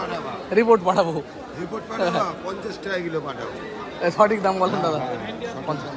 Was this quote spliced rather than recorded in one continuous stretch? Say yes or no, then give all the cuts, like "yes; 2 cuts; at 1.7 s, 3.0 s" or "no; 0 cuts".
no; 0 cuts